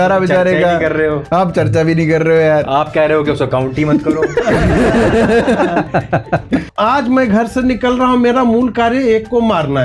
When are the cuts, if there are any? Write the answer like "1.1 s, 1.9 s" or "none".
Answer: 6.7 s